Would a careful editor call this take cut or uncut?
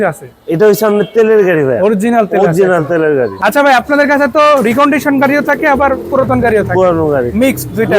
cut